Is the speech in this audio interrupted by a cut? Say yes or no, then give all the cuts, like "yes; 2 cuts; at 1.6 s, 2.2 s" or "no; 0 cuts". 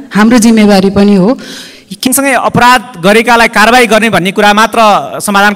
yes; 1 cut; at 2.1 s